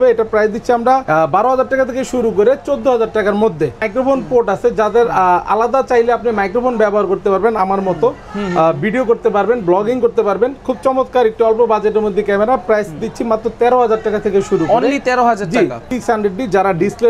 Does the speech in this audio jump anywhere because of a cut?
yes; 2 cuts; at 3.8 s, 15.8 s

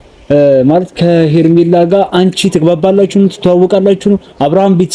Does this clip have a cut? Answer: no; 0 cuts

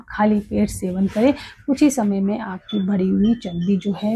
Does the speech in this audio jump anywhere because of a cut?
no; 0 cuts

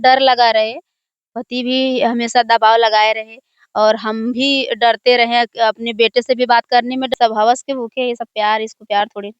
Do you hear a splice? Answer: yes; 1 cut; at 7.1 s

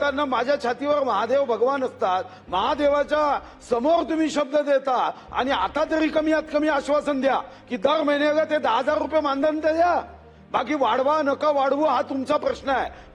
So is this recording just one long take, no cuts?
yes; 0 cuts

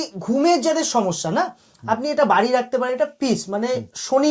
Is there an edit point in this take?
no; 0 cuts

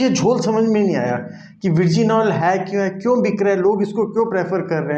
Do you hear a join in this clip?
no; 0 cuts

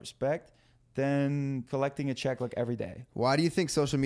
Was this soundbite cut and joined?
yes; 1 cut; at 1.6 s

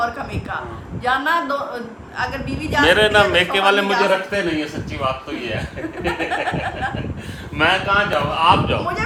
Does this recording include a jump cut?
no; 0 cuts

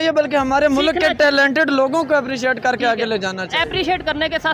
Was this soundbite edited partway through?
no; 0 cuts

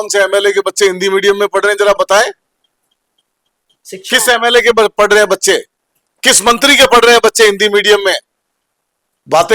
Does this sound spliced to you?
no; 0 cuts

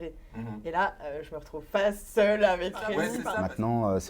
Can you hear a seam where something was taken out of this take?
yes; 1 cut; at 3.2 s

